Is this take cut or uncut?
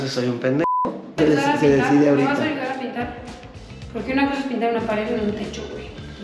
cut